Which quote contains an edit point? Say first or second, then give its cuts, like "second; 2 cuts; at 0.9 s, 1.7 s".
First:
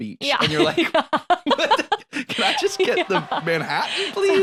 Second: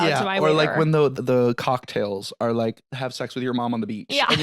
second; 2 cuts; at 1.1 s, 2.9 s